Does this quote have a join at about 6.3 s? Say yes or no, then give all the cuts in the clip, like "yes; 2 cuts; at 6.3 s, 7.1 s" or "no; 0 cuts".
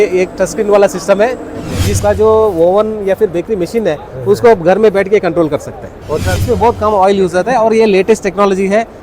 yes; 2 cuts; at 2.0 s, 6.3 s